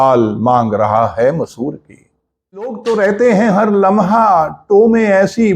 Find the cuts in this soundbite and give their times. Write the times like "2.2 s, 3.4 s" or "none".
2.8 s